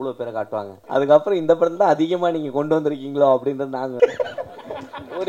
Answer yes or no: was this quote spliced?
yes